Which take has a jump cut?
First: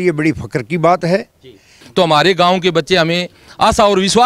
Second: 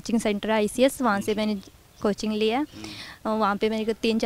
first; 1 cut; at 1.8 s

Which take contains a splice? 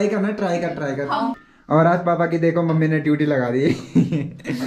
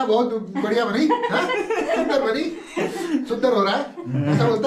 first; 1 cut; at 1.4 s

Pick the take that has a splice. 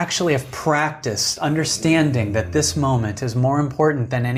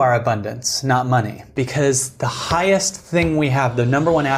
second; 1 cut; at 1.5 s

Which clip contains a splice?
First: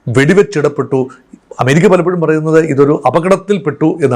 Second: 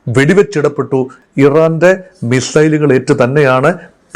second; 1 cut; at 1.2 s

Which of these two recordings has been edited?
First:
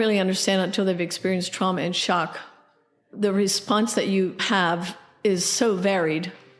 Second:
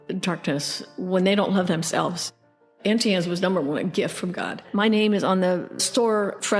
second; 2 cuts; at 2.6 s, 4.6 s

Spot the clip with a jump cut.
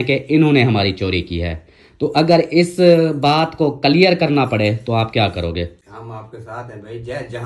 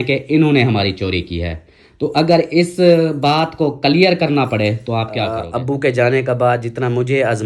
second; 1 cut; at 5.4 s

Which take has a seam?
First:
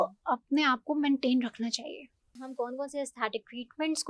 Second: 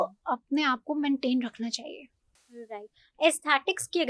first; 1 cut; at 2.5 s

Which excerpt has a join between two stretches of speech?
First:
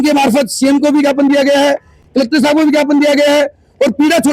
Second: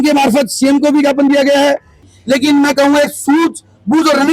second; 1 cut; at 2.0 s

